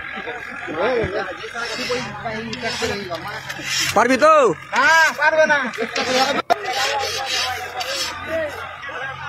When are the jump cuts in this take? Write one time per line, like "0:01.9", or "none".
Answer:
0:01.1